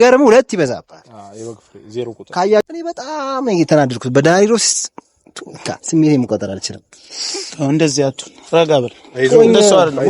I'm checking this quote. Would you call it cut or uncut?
cut